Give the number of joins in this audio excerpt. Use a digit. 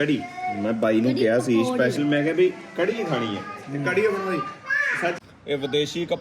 1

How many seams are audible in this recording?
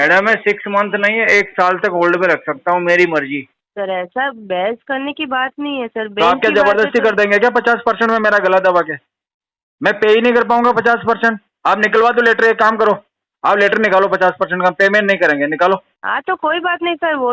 2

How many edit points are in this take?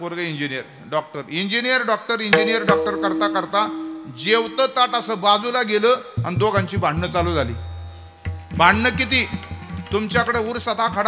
0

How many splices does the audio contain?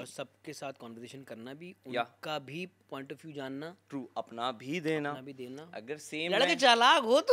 0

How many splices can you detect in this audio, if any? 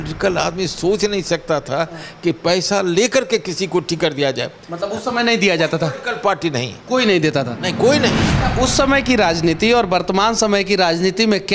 1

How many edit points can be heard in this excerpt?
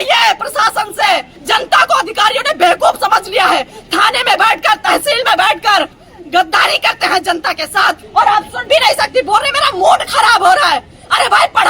2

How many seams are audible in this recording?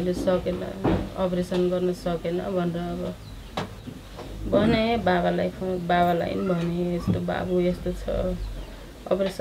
0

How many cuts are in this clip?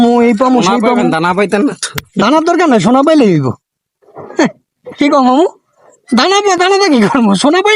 0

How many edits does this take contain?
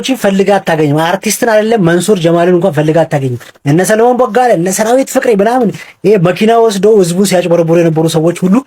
0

